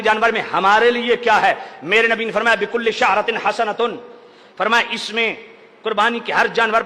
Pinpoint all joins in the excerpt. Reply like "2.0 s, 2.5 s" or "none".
none